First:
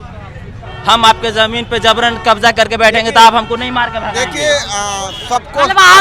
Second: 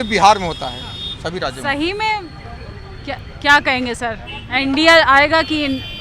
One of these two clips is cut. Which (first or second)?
second